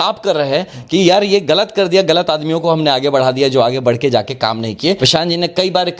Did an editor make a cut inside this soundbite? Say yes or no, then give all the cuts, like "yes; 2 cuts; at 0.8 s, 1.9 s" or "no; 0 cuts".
yes; 1 cut; at 5.0 s